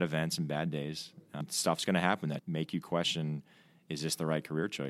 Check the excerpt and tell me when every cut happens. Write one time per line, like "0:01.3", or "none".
0:01.2
0:02.4